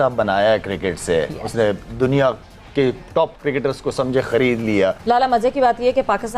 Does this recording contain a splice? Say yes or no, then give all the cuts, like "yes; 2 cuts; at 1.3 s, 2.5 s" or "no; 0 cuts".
yes; 1 cut; at 5.0 s